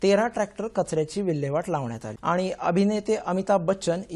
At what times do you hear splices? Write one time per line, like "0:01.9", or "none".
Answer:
0:02.1